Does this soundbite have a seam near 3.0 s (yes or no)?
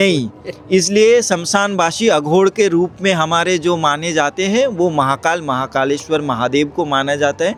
no